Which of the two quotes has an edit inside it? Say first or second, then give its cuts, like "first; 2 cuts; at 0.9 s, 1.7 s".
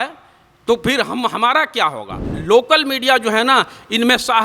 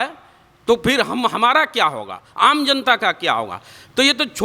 first; 1 cut; at 2.3 s